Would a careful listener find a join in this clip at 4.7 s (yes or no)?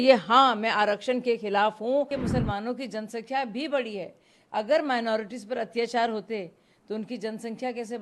no